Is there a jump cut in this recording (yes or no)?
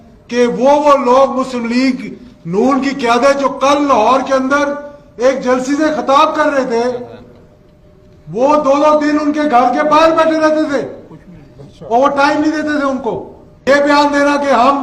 yes